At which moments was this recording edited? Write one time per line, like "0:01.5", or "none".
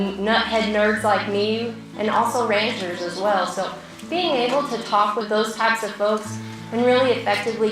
0:01.8
0:05.3